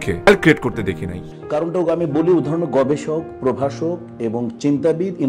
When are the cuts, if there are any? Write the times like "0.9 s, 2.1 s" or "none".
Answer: 1.2 s